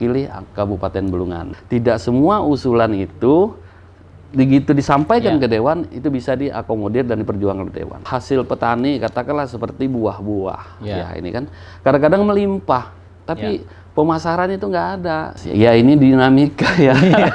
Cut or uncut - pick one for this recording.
cut